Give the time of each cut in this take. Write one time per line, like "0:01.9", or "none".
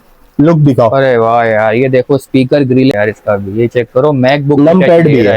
0:02.9